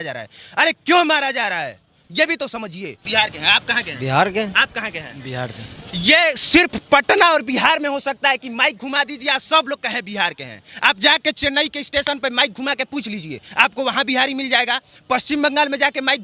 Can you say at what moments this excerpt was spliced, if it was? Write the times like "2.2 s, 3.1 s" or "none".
3.0 s